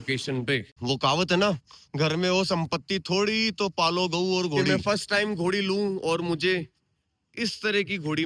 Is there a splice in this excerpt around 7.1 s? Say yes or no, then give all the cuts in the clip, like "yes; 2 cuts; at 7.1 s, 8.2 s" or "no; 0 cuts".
no; 2 cuts; at 0.8 s, 4.6 s